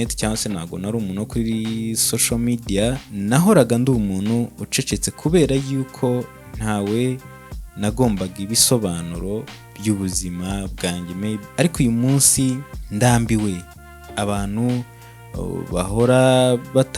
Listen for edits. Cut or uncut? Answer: cut